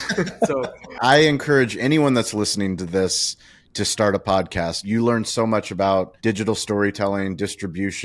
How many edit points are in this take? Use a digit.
3